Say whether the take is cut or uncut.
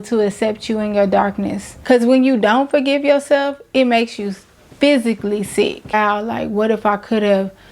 cut